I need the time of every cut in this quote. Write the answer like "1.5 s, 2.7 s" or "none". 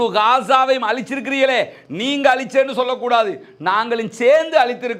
none